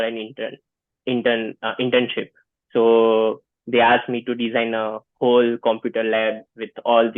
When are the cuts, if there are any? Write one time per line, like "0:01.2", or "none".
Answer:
none